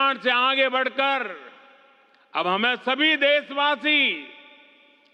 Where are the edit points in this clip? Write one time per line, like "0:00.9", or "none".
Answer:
none